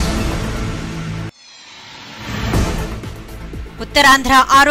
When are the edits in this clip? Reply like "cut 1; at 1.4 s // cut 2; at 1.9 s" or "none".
cut 1; at 1.5 s // cut 2; at 2.9 s